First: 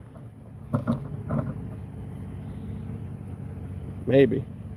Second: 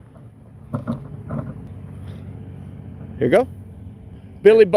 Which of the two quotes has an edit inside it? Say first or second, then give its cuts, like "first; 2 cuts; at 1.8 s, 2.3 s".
second; 1 cut; at 1.7 s